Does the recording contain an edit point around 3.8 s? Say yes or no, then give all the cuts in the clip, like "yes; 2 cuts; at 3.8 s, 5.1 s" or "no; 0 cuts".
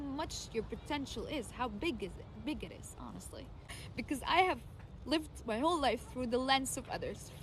yes; 1 cut; at 3.8 s